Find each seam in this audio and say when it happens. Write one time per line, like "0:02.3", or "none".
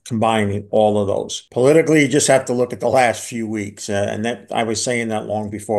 0:01.4